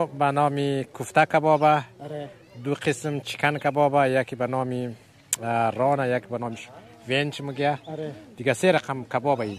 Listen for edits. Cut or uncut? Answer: uncut